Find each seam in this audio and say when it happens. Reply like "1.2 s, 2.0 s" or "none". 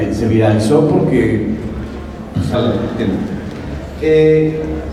none